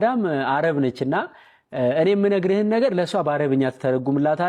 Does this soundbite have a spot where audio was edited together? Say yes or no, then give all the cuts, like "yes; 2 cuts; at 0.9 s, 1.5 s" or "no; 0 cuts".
no; 0 cuts